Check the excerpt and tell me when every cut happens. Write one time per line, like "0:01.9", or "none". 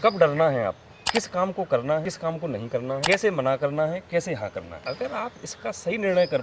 0:00.9
0:02.6
0:04.7